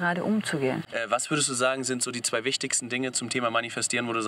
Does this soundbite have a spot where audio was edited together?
yes; 1 cut; at 0.9 s

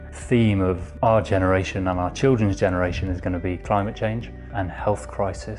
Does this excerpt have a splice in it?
no; 0 cuts

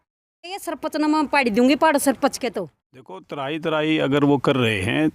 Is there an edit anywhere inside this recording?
yes; 1 cut; at 3.3 s

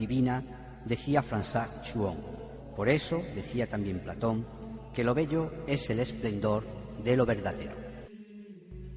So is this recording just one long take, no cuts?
yes; 0 cuts

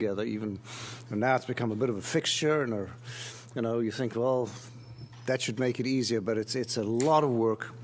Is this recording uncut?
no; 1 cut; at 3.0 s

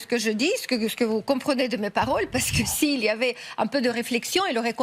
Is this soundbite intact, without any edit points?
yes; 0 cuts

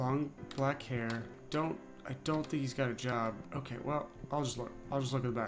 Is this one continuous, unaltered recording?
no; 2 cuts; at 1.4 s, 3.1 s

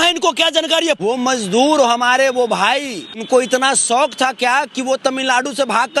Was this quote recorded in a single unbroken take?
no; 2 cuts; at 1.1 s, 3.2 s

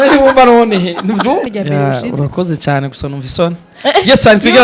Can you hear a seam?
yes; 1 cut; at 1.5 s

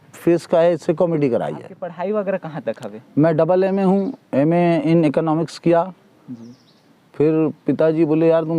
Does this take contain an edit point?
yes; 1 cut; at 1.8 s

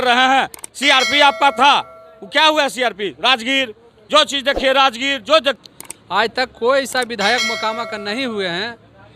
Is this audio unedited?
no; 1 cut; at 5.6 s

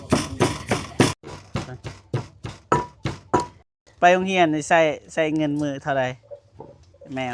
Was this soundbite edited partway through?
yes; 1 cut; at 3.6 s

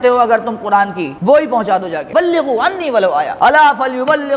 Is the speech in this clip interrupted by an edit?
yes; 3 cuts; at 1.1 s, 2.0 s, 3.3 s

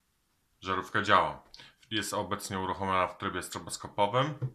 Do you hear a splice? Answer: no; 0 cuts

